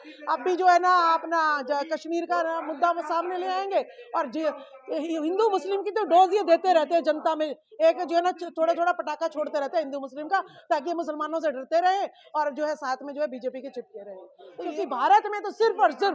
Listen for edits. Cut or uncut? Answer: cut